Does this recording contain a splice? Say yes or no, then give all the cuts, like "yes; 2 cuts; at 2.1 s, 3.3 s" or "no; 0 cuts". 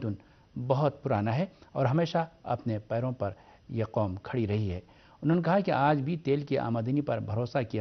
yes; 1 cut; at 2.4 s